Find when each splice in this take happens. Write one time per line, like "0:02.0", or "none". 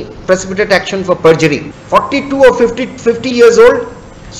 0:01.7

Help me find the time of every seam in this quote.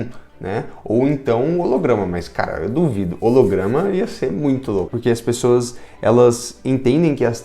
0:04.9

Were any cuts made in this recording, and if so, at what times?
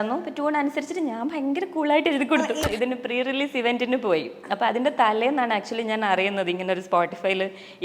0:02.6

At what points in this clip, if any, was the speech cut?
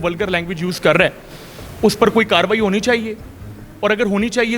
none

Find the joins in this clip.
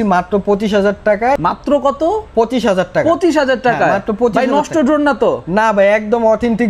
0:01.4

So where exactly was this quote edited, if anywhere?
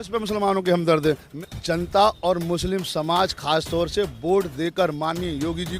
0:01.3

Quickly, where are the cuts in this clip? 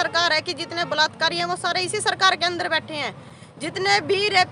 none

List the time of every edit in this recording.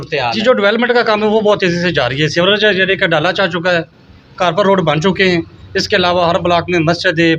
none

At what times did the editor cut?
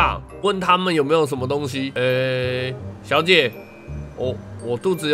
0:01.8

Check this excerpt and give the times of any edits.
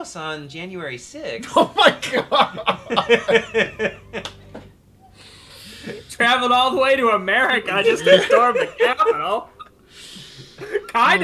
none

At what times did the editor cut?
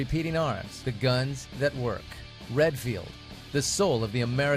none

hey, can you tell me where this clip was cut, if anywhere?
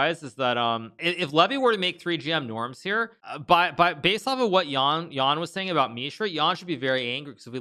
0:01.0
0:03.3

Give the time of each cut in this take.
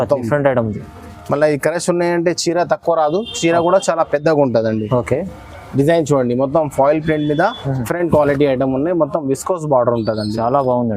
0:07.9

